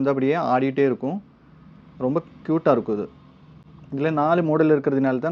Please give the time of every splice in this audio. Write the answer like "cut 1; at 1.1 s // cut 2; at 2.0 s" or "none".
none

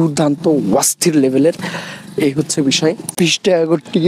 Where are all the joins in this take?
cut 1; at 3.1 s

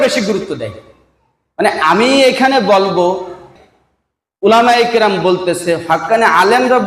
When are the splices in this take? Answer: cut 1; at 3.4 s

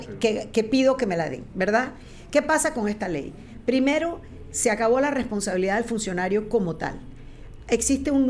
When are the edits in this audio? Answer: none

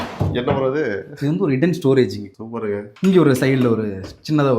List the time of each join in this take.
cut 1; at 2.9 s

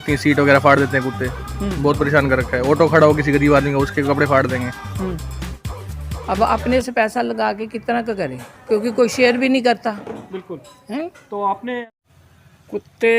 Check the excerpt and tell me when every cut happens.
cut 1; at 5.7 s // cut 2; at 11.8 s

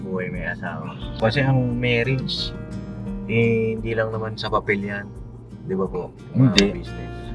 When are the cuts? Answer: cut 1; at 1.2 s

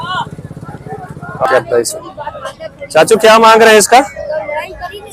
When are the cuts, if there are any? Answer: cut 1; at 1.4 s

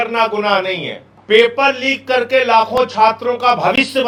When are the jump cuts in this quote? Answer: none

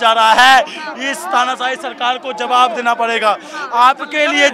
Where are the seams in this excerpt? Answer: none

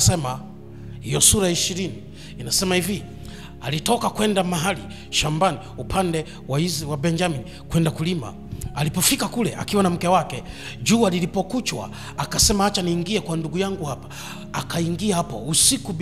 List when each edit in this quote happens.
none

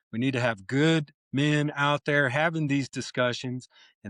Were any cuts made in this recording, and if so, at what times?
none

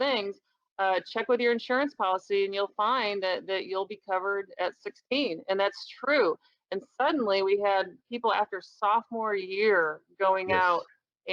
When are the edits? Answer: none

